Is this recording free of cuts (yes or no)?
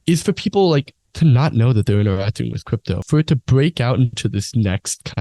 no